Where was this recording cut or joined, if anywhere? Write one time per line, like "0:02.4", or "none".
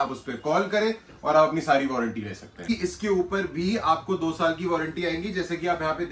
0:02.7